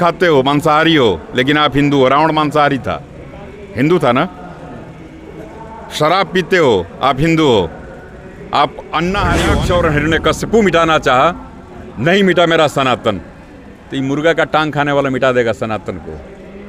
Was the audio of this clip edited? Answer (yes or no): yes